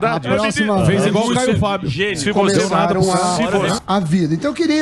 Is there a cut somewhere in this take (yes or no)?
yes